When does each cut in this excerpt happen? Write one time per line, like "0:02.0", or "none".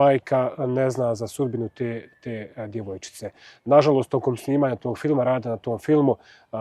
none